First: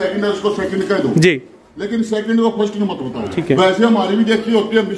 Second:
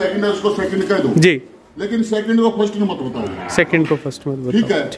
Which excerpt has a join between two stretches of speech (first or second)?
first